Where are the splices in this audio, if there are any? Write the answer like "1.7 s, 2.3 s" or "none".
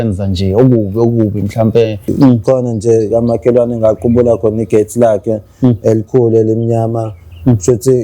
2.1 s

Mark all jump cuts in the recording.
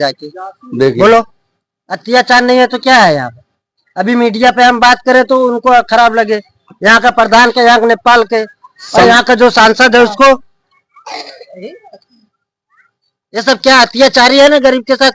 none

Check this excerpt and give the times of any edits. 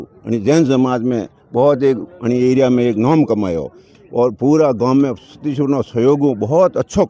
none

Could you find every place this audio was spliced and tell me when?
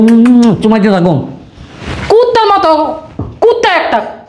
none

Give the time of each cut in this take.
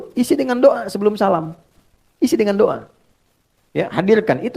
none

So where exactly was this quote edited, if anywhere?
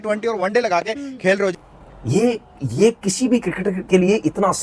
1.7 s

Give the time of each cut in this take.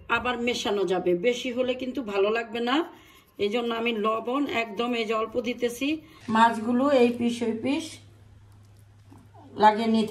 6.1 s

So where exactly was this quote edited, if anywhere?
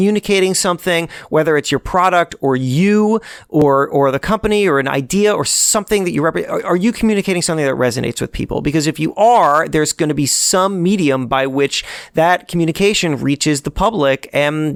none

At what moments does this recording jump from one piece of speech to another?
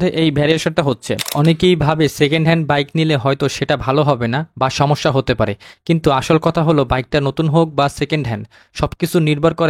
1.2 s

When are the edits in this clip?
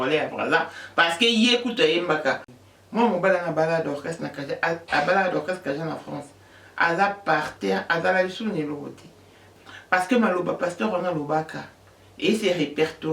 2.5 s, 9.4 s

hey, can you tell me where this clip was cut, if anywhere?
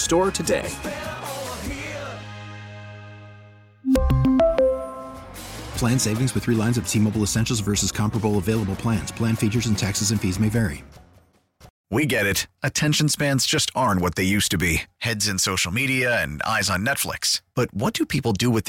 11.7 s

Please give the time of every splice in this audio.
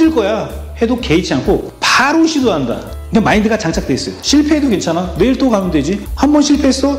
2.9 s

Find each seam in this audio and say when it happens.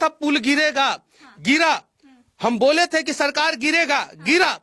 none

